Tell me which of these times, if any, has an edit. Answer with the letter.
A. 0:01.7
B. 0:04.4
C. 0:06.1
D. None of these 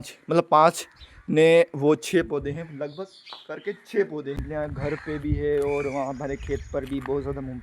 B